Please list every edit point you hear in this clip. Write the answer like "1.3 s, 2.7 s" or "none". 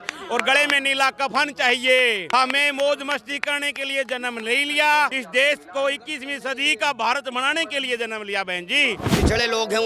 2.2 s, 5.2 s, 9.1 s